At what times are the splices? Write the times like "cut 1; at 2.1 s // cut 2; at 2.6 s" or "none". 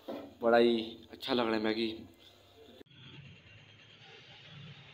cut 1; at 2.7 s